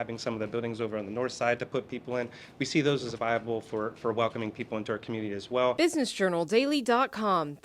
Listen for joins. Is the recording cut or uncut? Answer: cut